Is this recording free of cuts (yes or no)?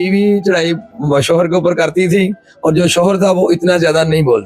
yes